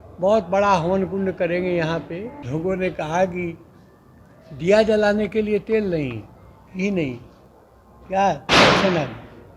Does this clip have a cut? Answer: yes; 1 cut; at 2.3 s

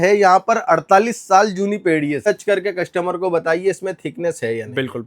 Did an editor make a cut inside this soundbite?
yes; 1 cut; at 2.2 s

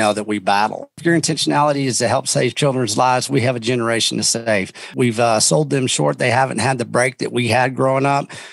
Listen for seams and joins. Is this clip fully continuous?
no; 2 cuts; at 1.0 s, 4.9 s

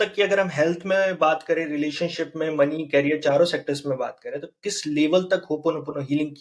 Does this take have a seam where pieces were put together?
no; 0 cuts

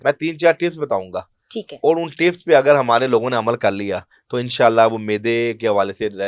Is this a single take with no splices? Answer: yes; 0 cuts

